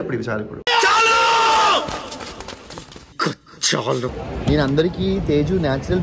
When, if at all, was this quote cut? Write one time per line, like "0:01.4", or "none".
0:04.2